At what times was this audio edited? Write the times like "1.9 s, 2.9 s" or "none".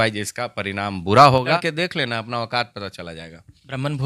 1.6 s